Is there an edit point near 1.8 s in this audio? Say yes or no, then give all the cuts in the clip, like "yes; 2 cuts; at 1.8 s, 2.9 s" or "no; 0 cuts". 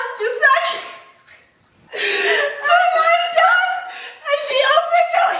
yes; 1 cut; at 1.8 s